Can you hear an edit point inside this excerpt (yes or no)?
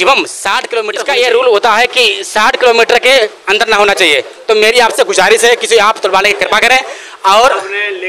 yes